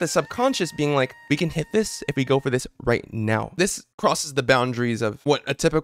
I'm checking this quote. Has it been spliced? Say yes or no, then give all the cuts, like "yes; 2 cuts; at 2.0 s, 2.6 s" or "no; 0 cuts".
yes; 2 cuts; at 1.2 s, 3.9 s